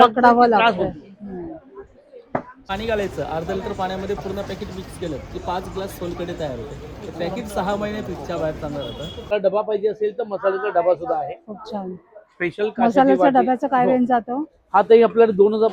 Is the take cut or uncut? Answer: cut